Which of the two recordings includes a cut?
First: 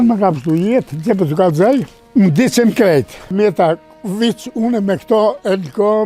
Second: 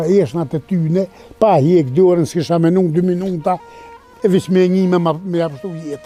first; 2 cuts; at 2.0 s, 3.3 s

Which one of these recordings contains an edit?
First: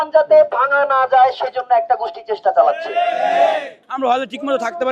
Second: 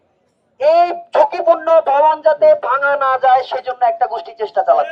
first; 1 cut; at 3.9 s

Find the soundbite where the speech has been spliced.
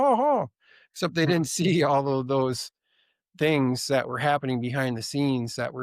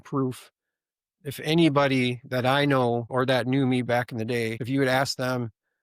second; 2 cuts; at 3.1 s, 4.6 s

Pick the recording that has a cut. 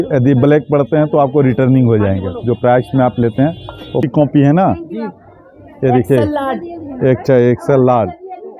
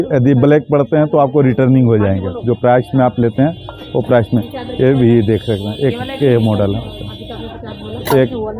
first; 1 cut; at 4.1 s

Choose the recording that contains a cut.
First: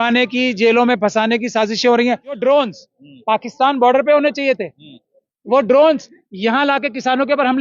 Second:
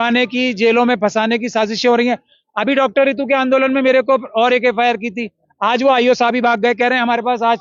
first; 1 cut; at 2.4 s

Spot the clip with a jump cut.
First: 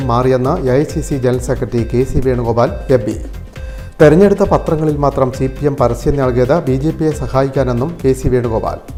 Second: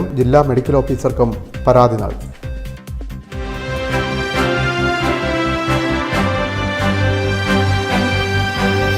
second; 1 cut; at 3.6 s

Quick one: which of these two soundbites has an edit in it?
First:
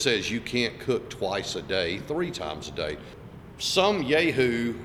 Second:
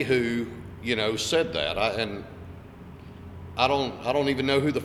first; 1 cut; at 3.1 s

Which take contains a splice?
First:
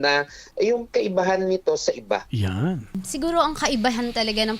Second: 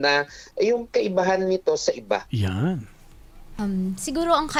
first; 1 cut; at 3.0 s

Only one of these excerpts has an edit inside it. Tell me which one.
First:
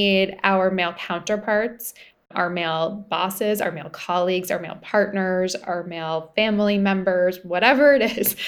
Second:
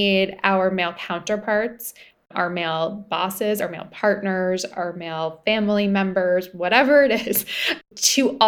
second; 1 cut; at 3.6 s

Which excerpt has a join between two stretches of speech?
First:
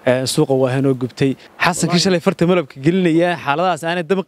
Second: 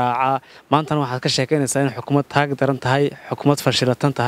first; 1 cut; at 1.5 s

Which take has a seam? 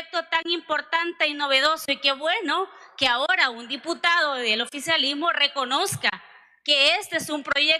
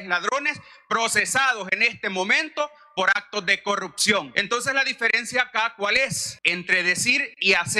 second; 2 cuts; at 4.4 s, 6.3 s

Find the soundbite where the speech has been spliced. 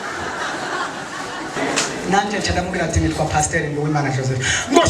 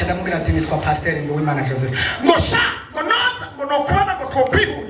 first; 1 cut; at 1.6 s

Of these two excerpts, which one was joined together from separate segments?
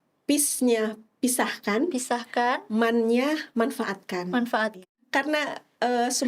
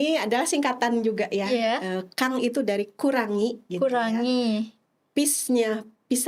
first; 1 cut; at 5.0 s

